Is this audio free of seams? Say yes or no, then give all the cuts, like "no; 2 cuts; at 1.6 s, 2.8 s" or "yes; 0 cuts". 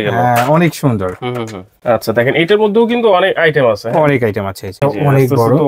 no; 2 cuts; at 1.7 s, 4.7 s